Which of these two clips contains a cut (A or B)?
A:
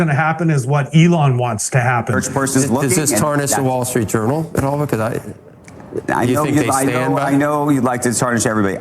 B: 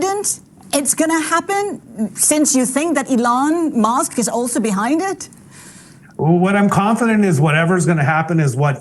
A